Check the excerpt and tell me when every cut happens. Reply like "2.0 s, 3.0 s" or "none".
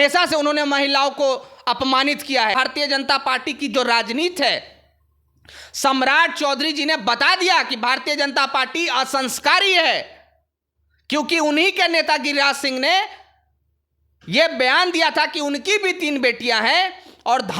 2.6 s